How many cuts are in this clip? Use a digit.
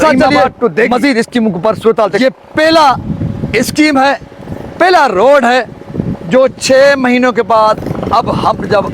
1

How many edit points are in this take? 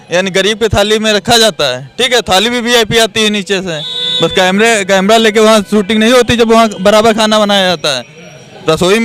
0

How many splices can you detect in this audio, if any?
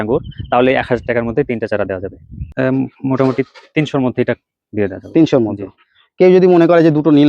1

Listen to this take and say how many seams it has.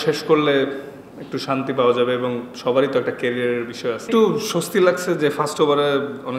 1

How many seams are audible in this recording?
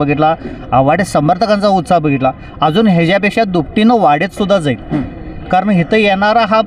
0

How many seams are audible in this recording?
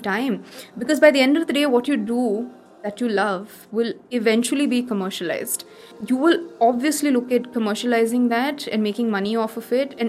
1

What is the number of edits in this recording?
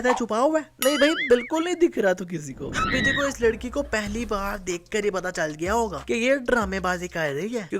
1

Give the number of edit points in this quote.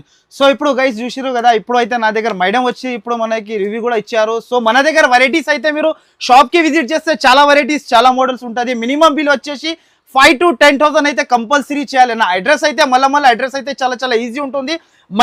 0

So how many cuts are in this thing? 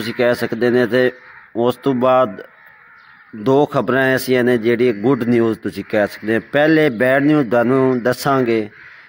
0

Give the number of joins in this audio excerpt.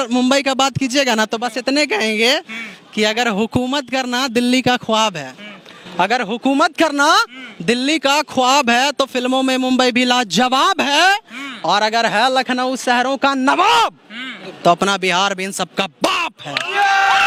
0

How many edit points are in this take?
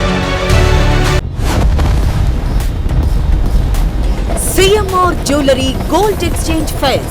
1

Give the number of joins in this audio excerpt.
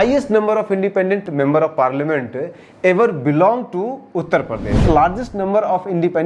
2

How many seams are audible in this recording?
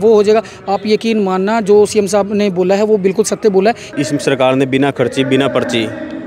1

